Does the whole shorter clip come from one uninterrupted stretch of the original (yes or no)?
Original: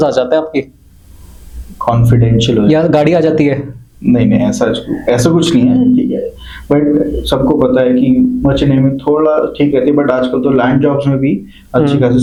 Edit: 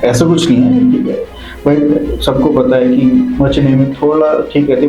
yes